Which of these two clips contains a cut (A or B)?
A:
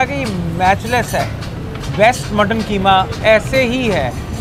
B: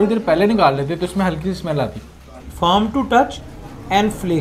B